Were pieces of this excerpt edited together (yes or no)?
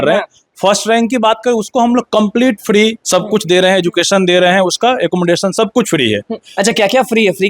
yes